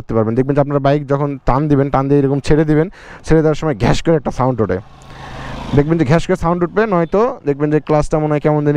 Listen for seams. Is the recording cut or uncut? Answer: uncut